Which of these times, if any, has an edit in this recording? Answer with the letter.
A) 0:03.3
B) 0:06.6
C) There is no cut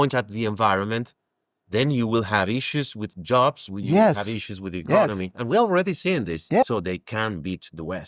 B